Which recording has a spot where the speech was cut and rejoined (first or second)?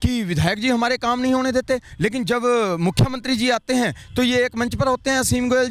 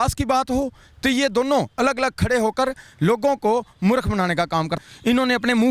second